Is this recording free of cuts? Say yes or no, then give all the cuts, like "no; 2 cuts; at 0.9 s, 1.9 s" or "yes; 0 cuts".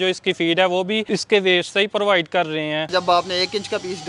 no; 2 cuts; at 1.0 s, 2.9 s